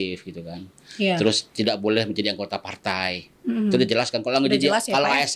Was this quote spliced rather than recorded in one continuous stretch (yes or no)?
no